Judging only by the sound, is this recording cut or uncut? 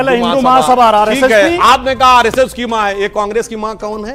uncut